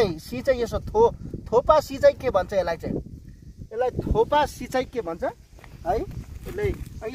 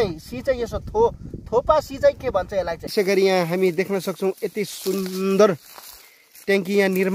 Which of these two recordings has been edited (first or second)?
second